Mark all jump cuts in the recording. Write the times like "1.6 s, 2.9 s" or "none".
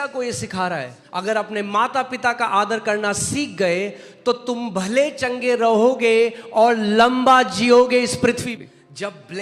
1.0 s, 8.4 s